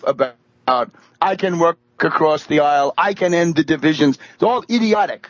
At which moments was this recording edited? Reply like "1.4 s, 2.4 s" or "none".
0.9 s

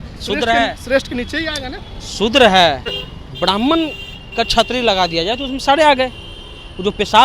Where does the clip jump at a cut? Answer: 3.0 s

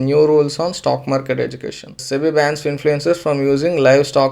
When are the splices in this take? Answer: 2.0 s

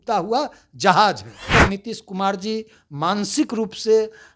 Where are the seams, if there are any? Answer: 1.5 s

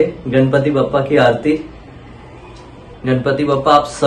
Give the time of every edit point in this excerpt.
2.9 s

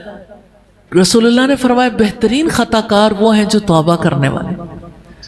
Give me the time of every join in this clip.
none

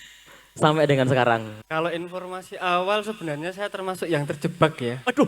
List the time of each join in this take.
1.6 s

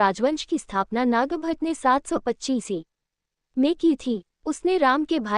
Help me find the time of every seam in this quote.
none

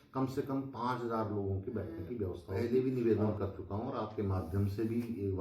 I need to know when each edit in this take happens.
2.4 s

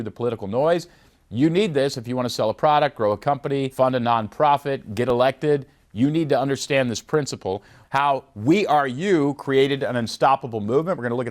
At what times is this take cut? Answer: 3.7 s, 7.7 s

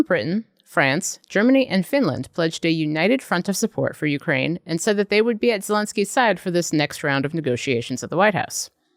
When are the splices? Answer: none

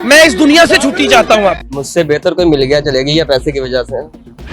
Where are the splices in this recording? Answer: 1.7 s

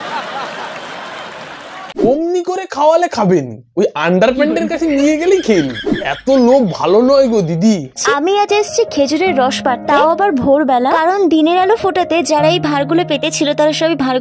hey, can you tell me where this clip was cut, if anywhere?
2.0 s, 7.9 s

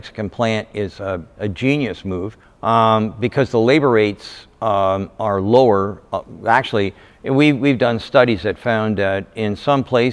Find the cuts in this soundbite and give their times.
none

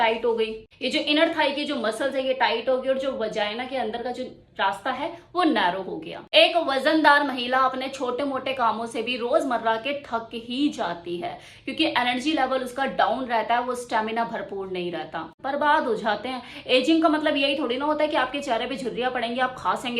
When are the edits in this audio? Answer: 15.3 s

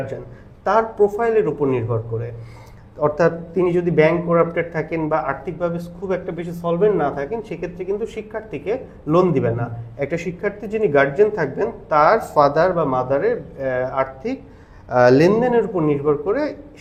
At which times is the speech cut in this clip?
none

